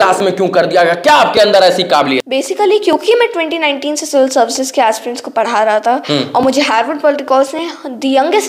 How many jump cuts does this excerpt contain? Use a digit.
1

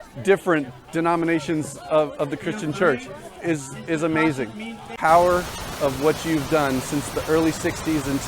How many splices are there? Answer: 1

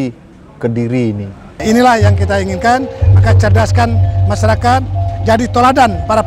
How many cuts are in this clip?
1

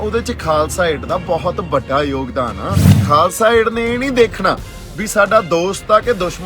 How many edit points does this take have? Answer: 1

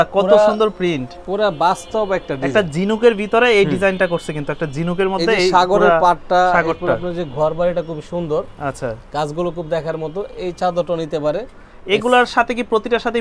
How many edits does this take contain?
0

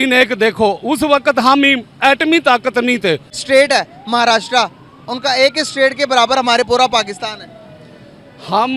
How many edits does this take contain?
1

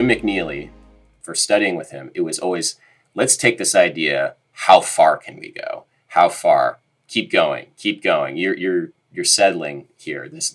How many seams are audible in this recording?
0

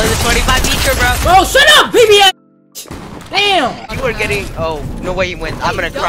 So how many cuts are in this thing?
1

